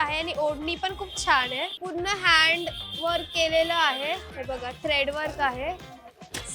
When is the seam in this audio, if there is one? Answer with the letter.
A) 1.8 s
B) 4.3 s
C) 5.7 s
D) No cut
A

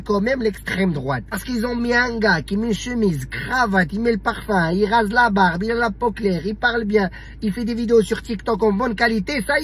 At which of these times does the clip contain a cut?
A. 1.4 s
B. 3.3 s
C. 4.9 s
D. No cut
A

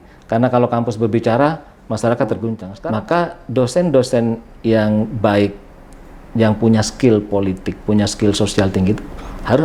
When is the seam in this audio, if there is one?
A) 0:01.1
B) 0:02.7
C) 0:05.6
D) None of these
B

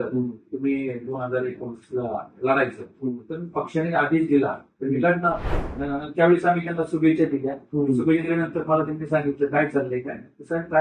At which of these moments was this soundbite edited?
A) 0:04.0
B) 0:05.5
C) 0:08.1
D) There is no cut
B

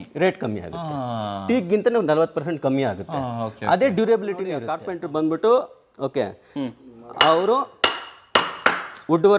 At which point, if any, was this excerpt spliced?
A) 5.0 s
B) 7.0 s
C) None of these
A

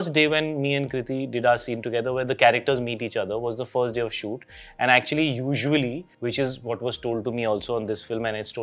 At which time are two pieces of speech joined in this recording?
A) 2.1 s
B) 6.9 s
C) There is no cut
C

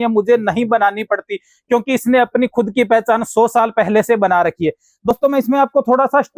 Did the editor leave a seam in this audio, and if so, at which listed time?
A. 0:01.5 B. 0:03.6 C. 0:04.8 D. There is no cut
D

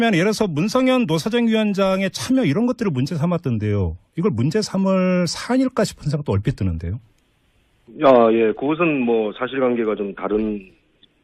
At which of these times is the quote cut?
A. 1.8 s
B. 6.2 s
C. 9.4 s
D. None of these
D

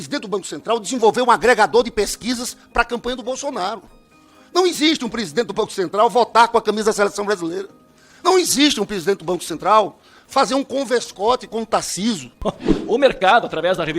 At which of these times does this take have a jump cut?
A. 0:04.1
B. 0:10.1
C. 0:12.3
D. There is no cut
C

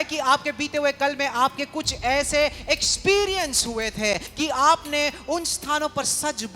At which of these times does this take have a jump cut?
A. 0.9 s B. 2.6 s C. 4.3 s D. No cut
C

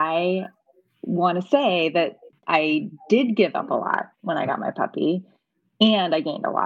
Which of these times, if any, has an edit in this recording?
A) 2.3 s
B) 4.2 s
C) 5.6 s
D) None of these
A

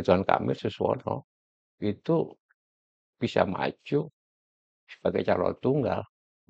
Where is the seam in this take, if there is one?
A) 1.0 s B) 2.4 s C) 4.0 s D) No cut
D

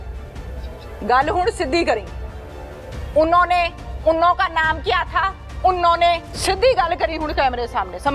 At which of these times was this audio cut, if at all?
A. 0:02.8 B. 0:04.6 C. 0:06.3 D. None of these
C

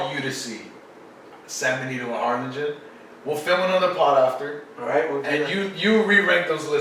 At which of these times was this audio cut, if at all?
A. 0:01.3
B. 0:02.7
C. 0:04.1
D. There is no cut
D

